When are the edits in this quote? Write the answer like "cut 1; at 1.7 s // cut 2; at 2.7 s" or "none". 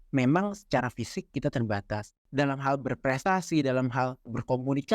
cut 1; at 2.1 s